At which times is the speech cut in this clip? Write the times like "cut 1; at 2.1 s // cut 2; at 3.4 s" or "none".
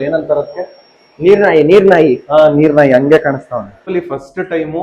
cut 1; at 3.8 s